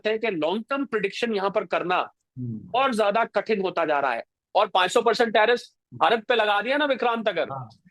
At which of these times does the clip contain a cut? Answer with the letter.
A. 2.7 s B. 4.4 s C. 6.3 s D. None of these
B